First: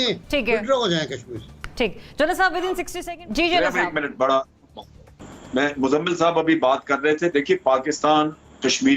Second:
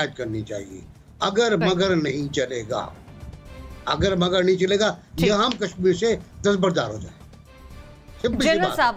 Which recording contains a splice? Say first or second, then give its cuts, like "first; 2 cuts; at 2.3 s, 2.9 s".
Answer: first; 1 cut; at 2.9 s